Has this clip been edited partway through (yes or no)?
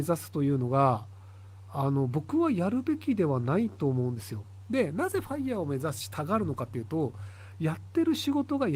no